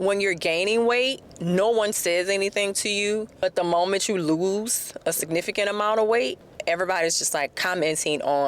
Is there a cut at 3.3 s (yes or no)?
yes